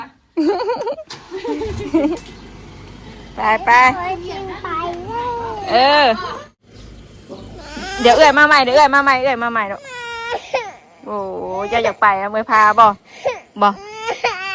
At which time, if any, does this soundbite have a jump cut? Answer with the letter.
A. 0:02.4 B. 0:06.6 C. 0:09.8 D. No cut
B